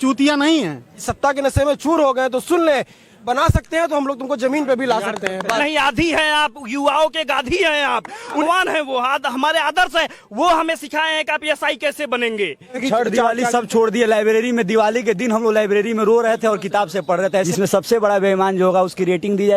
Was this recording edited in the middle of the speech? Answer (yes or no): yes